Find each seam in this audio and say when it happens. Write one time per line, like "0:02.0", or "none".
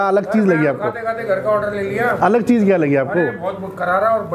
none